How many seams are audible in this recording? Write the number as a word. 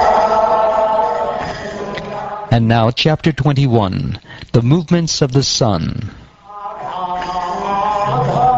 one